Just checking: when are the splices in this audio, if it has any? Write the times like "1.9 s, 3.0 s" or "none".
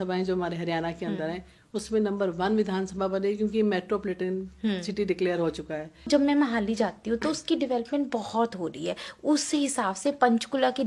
6.1 s